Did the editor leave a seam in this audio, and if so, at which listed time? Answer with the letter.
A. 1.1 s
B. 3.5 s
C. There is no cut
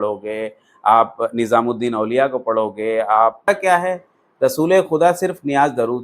B